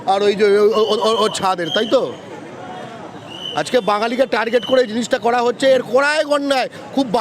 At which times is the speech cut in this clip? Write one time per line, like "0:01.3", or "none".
none